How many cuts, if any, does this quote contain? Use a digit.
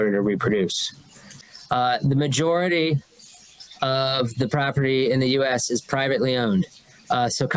1